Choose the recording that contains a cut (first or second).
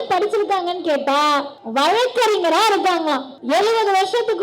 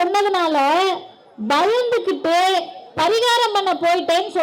first